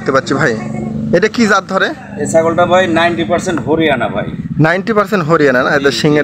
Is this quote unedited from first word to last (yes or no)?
yes